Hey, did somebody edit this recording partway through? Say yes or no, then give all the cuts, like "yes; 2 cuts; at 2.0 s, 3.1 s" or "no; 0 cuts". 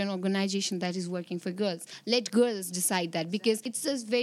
no; 0 cuts